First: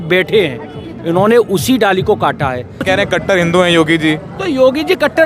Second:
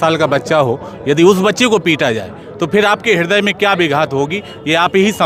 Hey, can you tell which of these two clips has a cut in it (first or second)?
first